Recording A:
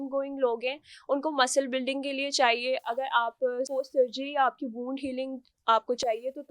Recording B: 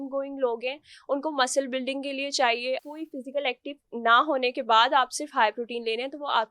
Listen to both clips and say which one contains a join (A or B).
B